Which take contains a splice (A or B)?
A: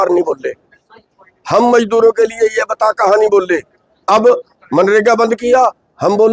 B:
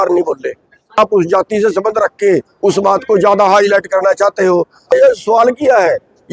B